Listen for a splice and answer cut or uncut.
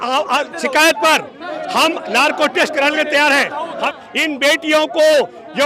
cut